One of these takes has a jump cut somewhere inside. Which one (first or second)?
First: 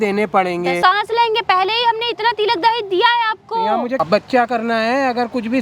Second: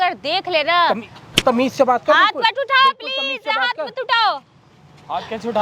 first